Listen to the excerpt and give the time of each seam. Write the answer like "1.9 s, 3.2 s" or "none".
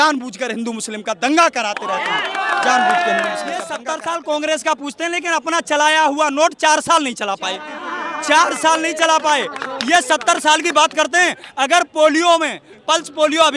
3.8 s